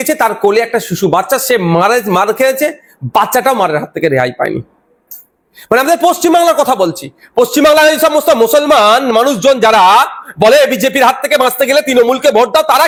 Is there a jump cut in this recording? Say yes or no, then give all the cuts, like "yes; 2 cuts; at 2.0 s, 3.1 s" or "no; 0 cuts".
no; 0 cuts